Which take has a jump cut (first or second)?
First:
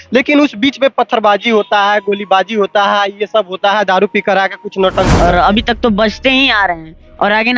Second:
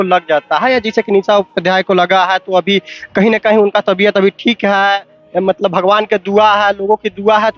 first